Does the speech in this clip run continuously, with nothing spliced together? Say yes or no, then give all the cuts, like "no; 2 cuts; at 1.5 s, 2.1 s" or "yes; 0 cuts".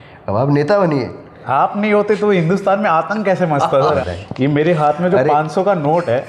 no; 2 cuts; at 1.4 s, 4.0 s